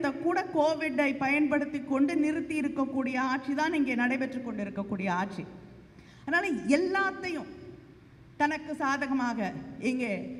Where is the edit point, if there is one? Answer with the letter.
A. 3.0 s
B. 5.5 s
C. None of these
C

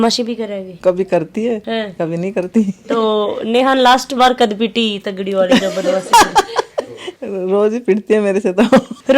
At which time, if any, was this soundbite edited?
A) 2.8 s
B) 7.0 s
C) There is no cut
C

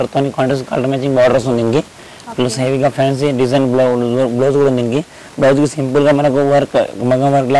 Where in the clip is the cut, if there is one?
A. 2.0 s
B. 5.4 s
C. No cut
C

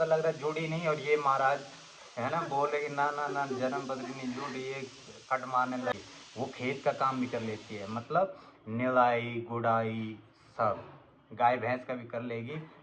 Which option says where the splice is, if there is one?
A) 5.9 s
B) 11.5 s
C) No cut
A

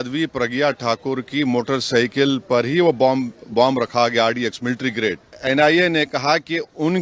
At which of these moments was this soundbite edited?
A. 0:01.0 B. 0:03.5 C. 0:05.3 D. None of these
C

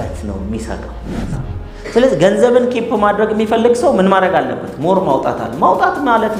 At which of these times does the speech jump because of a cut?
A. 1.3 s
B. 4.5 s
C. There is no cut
A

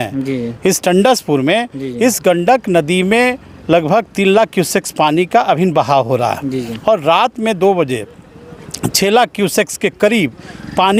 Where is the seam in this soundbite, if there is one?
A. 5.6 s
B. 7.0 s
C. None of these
C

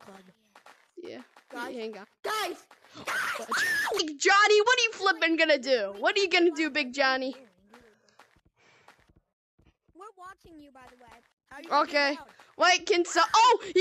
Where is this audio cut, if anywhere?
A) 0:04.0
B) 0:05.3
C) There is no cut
A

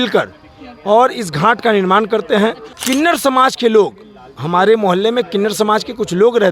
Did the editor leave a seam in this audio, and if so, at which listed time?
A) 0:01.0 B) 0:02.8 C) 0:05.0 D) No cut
B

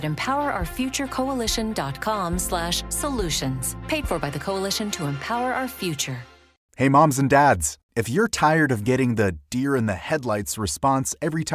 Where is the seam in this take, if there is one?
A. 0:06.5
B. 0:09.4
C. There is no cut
A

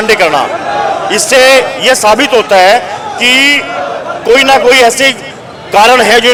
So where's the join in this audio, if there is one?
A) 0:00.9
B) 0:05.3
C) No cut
C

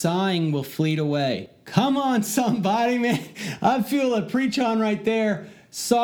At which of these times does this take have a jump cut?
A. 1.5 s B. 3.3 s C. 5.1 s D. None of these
A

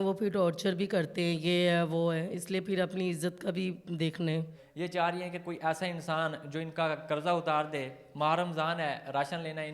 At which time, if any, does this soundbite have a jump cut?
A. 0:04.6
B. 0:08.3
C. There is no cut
A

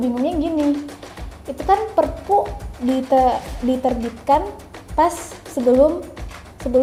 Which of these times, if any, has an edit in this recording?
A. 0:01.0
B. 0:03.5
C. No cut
C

